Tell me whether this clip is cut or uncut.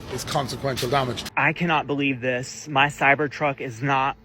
cut